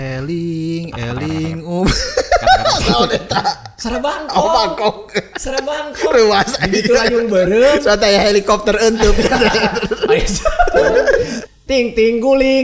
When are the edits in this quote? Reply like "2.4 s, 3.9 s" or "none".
11.4 s